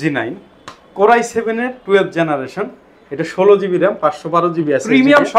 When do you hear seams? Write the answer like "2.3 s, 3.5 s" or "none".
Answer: none